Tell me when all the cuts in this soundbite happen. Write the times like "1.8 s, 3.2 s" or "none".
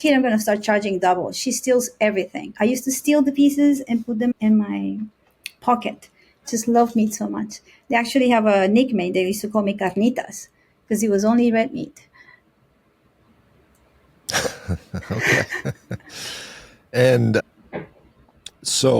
none